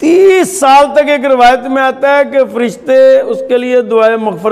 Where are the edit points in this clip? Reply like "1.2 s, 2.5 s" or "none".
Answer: none